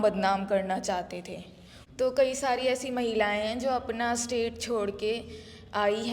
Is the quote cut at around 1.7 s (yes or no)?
yes